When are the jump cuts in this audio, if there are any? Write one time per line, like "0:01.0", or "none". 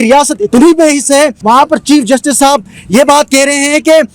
0:01.4